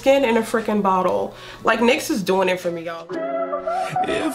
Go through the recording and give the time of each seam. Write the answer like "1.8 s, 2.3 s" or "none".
3.0 s